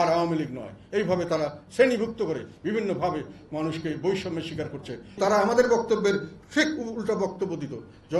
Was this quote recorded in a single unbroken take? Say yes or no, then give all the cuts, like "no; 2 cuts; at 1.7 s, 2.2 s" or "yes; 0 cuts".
no; 1 cut; at 5.2 s